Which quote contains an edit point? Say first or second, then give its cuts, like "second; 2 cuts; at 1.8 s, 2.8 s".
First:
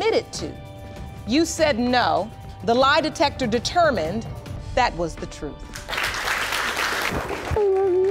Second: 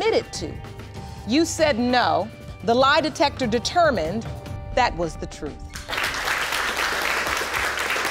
first; 1 cut; at 7.1 s